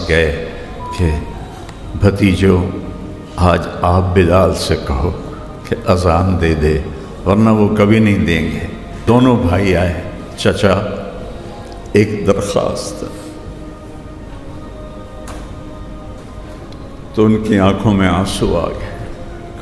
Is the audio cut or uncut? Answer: cut